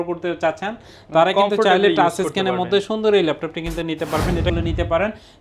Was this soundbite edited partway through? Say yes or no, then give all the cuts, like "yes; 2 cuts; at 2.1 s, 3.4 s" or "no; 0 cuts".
yes; 1 cut; at 4.5 s